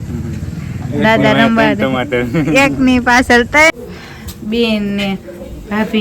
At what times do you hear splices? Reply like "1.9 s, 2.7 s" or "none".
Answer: 3.7 s